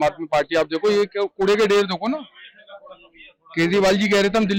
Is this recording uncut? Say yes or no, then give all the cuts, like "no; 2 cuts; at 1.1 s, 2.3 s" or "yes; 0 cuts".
yes; 0 cuts